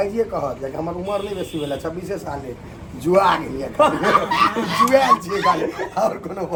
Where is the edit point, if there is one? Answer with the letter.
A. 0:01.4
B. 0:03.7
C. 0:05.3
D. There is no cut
D